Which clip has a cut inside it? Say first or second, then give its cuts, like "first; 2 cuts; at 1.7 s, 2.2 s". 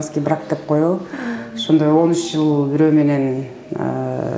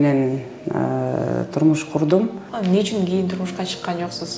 second; 1 cut; at 2.4 s